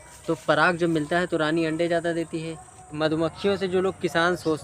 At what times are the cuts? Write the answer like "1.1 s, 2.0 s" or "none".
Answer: 2.9 s